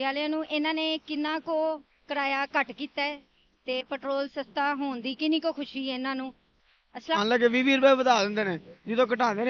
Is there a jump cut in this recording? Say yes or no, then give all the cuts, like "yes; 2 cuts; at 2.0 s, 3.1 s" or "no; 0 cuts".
yes; 1 cut; at 7.2 s